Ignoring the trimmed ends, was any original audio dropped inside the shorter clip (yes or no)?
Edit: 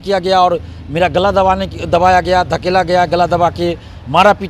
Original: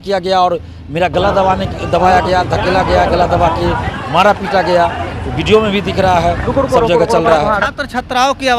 no